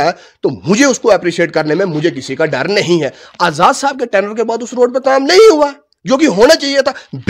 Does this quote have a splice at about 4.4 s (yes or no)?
no